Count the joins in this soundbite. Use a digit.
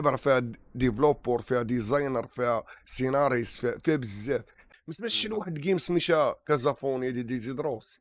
1